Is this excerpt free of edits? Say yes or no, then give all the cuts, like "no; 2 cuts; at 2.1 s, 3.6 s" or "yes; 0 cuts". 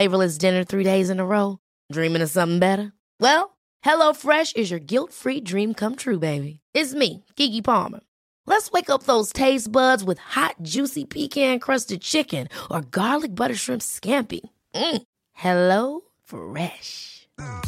yes; 0 cuts